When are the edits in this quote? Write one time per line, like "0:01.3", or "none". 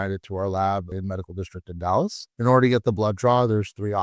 0:00.9